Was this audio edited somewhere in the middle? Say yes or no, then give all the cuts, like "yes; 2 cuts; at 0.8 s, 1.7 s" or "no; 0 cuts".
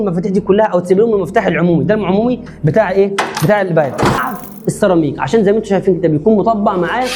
yes; 1 cut; at 4.2 s